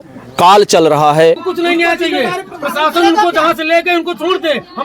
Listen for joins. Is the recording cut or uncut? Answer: cut